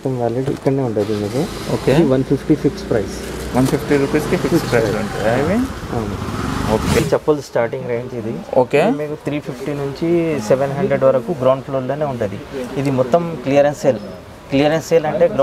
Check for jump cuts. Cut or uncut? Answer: uncut